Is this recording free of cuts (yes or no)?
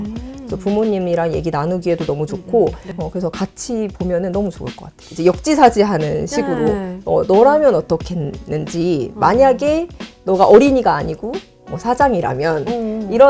no